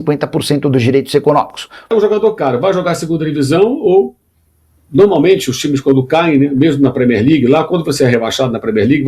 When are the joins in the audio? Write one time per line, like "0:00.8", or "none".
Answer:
0:01.9